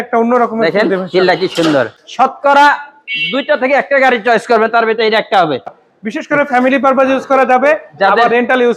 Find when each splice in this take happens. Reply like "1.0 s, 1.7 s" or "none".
2.0 s, 5.8 s

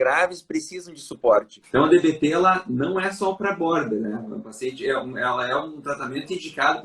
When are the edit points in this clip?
1.6 s

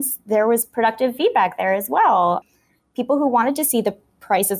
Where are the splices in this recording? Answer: none

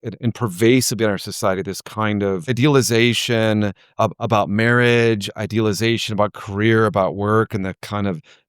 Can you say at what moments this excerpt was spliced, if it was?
2.6 s, 3.8 s

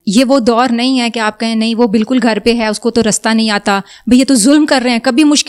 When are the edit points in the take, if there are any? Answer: none

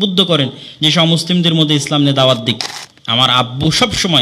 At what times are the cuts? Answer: 2.7 s

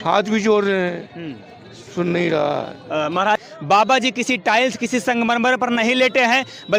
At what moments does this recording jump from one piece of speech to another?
3.4 s

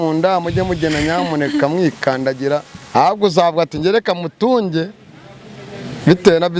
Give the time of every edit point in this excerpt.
2.8 s

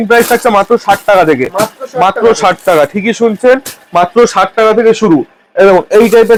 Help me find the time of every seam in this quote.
none

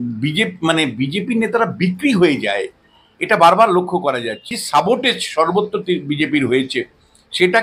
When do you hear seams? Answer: 4.5 s

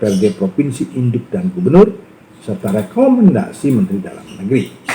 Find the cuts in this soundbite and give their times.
none

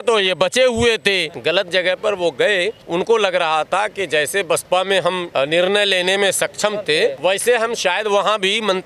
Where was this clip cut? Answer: 1.3 s, 2.8 s, 5.2 s, 7.2 s

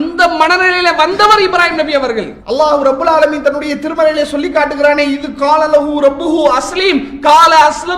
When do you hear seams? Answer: 2.3 s

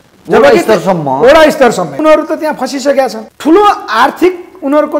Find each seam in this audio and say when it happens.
2.0 s, 3.3 s

